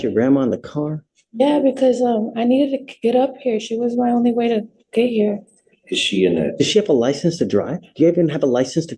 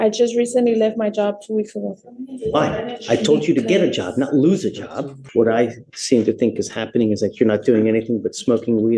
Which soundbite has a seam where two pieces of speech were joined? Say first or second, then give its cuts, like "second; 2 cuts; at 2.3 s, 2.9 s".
second; 2 cuts; at 5.2 s, 7.8 s